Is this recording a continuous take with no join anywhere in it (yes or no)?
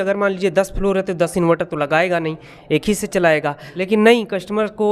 no